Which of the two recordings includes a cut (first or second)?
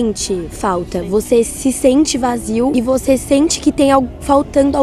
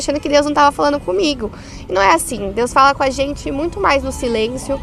first